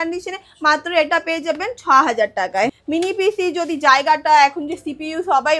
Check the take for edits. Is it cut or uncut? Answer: cut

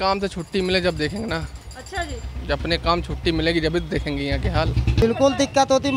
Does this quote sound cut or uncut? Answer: cut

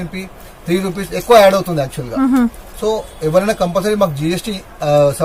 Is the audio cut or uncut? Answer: uncut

